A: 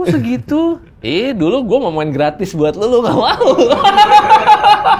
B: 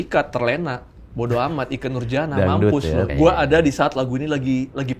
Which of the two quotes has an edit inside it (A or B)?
B